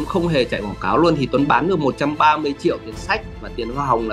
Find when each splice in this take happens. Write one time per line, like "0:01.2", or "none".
none

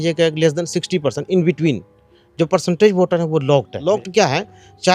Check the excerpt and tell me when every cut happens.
0:03.7

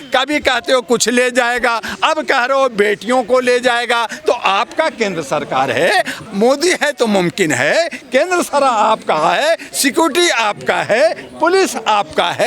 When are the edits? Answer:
none

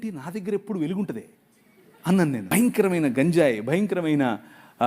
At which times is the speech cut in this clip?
0:02.5

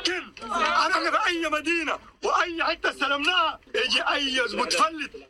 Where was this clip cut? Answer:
0:02.1

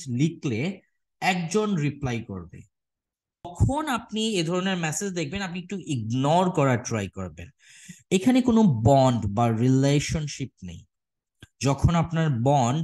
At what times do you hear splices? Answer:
0:03.5

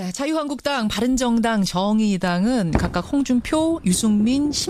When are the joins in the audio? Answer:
none

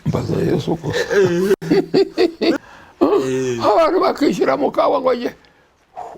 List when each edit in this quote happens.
0:02.6

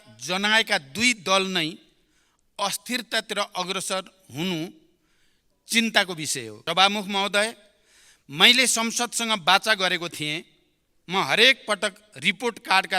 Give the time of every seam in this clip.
0:06.5

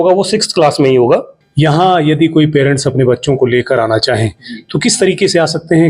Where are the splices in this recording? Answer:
0:01.4

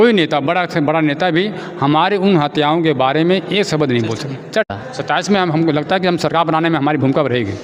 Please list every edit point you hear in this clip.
0:04.7

